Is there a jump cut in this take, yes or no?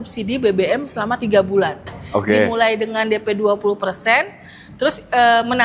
yes